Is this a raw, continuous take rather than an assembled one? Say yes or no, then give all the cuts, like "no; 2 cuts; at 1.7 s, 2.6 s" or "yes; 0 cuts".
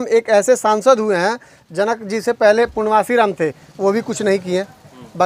yes; 0 cuts